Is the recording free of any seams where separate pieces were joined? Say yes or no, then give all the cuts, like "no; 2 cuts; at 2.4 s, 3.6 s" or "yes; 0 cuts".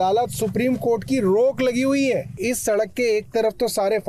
no; 1 cut; at 2.4 s